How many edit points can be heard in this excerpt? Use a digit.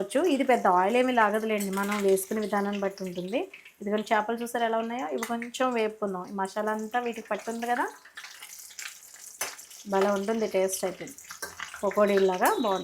0